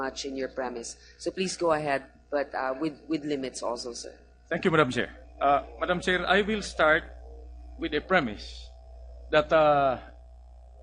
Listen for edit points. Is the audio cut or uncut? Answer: uncut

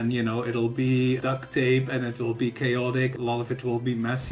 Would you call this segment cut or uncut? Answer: cut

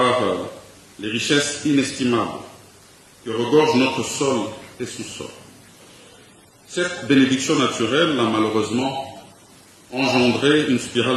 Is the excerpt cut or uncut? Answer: uncut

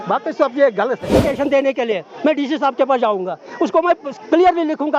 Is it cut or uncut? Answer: cut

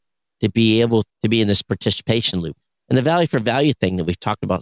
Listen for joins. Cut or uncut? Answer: cut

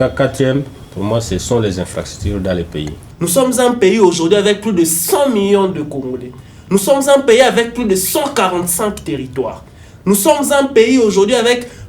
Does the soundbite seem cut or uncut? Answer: cut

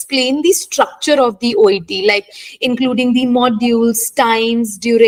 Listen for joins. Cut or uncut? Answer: uncut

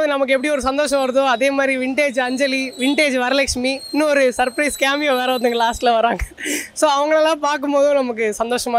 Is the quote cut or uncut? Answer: uncut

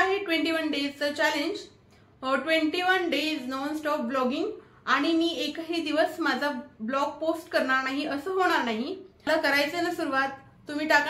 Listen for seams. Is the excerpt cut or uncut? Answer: cut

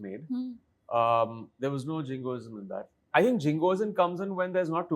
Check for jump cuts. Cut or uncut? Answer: cut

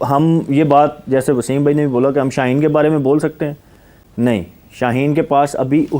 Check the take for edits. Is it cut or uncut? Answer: uncut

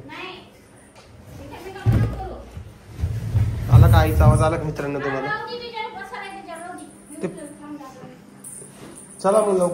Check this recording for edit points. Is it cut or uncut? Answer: uncut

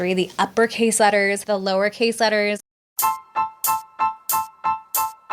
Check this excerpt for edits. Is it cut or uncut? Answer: cut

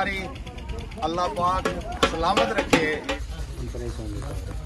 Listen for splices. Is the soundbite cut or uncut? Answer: cut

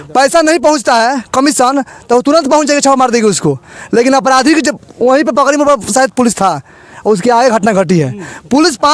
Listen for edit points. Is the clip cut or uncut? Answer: uncut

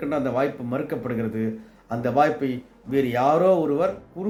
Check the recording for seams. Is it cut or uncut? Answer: uncut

